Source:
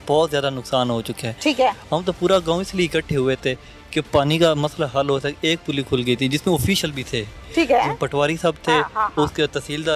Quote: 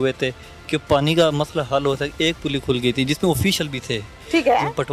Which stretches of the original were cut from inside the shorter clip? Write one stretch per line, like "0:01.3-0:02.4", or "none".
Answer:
none